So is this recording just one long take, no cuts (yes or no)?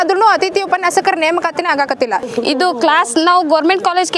no